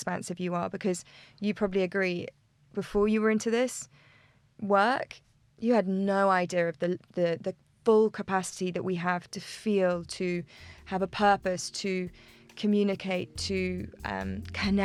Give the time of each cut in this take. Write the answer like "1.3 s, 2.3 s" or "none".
none